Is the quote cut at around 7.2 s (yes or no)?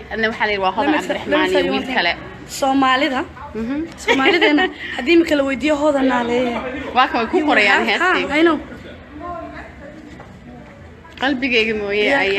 no